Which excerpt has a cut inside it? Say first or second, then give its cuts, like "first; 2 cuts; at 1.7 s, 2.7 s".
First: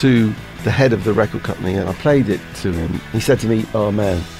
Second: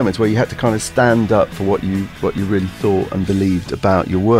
first; 2 cuts; at 1.9 s, 3.0 s